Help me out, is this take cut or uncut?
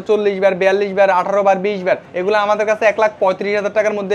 cut